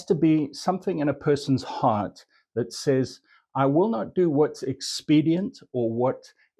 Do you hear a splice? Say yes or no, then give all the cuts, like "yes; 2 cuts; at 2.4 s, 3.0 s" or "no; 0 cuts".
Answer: no; 0 cuts